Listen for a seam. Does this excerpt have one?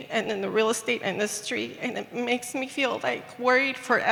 no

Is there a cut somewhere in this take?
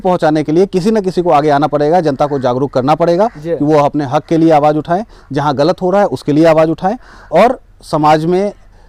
no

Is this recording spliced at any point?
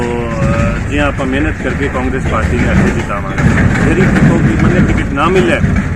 no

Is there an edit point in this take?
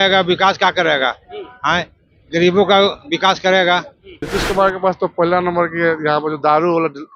yes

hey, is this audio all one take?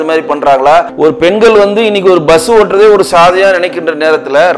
no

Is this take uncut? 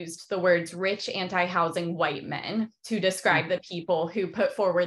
yes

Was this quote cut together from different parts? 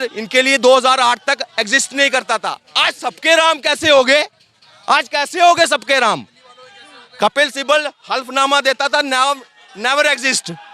no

